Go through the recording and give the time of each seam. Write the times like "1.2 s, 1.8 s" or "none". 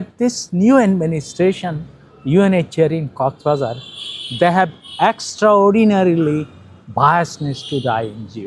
none

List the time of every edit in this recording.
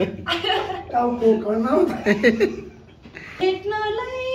3.3 s

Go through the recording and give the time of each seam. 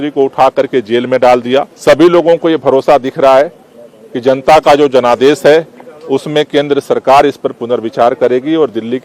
1.7 s

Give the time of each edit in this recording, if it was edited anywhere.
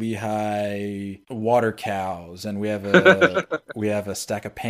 1.2 s

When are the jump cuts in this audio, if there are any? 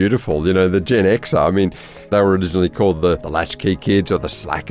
1.9 s, 3.3 s

